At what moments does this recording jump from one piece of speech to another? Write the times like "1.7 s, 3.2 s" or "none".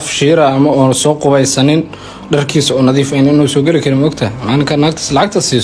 none